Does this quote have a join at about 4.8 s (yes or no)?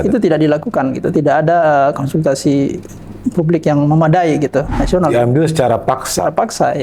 yes